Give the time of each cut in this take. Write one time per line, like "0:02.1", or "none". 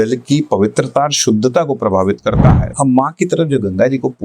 0:02.6